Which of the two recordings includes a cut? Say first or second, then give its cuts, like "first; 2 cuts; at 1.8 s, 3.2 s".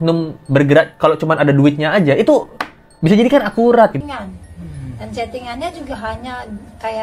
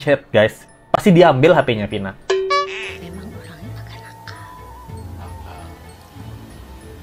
first; 1 cut; at 4.0 s